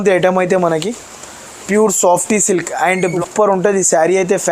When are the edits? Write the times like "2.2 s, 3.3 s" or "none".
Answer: 3.1 s